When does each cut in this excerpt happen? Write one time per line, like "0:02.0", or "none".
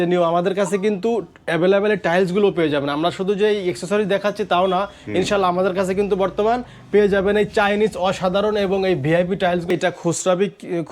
0:09.7